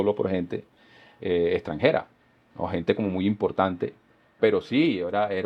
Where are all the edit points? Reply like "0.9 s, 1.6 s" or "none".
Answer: 4.3 s